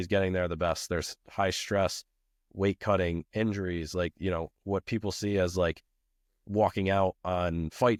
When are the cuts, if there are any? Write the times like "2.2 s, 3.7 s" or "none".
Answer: none